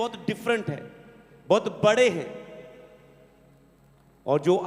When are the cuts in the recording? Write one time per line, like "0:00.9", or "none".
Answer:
none